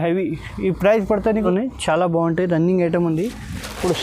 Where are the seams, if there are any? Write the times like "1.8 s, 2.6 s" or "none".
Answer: 1.5 s